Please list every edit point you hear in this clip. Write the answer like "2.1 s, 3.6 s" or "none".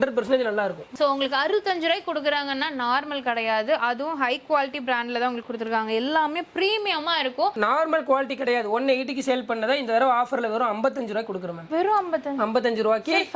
1.0 s, 7.5 s

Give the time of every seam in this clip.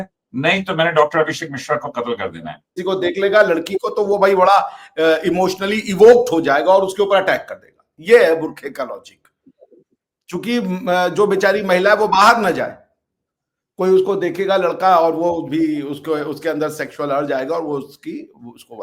2.8 s

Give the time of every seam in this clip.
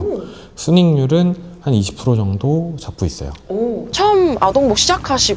3.8 s

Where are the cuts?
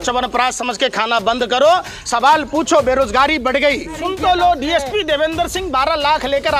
3.9 s

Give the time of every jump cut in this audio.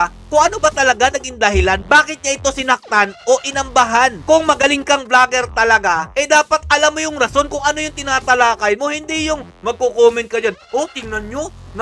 none

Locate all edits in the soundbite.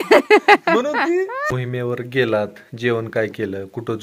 1.4 s

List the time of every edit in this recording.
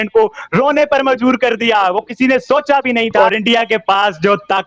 3.1 s

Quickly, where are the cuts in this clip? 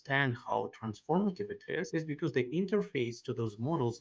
1.9 s

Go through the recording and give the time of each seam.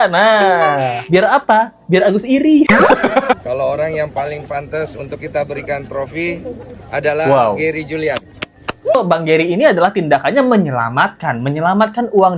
3.4 s, 9.0 s

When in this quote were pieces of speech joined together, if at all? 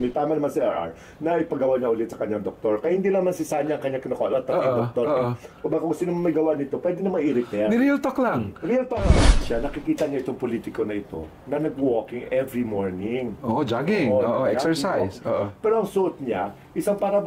9.3 s

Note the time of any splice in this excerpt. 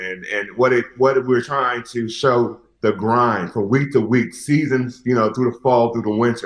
2.6 s

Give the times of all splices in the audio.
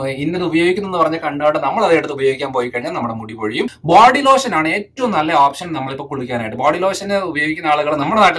3.8 s

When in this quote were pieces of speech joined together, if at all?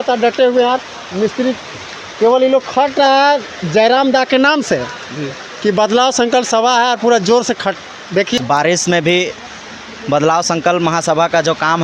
8.3 s

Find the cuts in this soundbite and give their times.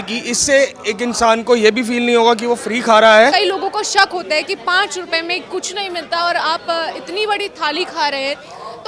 3.3 s

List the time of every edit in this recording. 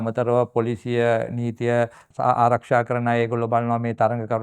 2.0 s

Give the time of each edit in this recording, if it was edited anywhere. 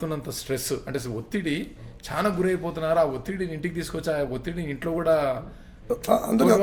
none

